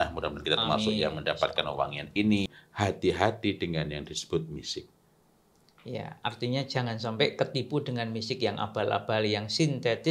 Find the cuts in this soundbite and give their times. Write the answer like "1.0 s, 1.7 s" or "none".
2.6 s